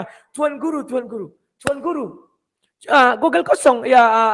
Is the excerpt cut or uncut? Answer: uncut